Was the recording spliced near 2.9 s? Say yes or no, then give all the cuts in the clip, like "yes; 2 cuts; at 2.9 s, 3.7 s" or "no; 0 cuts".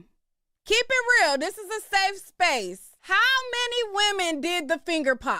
yes; 1 cut; at 2.9 s